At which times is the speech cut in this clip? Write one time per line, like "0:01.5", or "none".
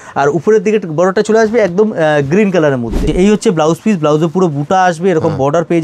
0:03.1

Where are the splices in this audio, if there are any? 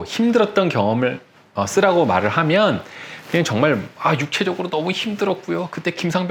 none

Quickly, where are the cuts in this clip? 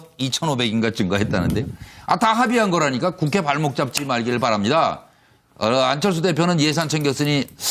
0:04.2

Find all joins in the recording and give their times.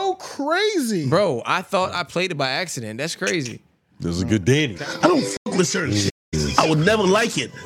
0:04.8

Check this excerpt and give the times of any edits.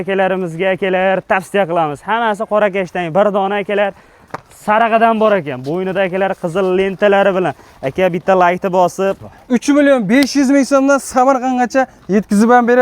0:09.2

